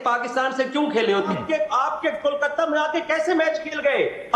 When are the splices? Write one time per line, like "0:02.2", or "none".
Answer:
0:01.3